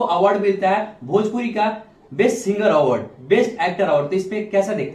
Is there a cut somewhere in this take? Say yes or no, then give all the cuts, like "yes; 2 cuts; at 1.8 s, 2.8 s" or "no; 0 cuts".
no; 0 cuts